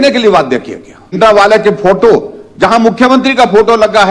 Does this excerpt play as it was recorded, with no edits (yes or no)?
no